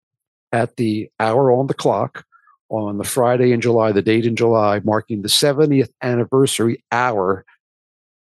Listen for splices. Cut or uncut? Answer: uncut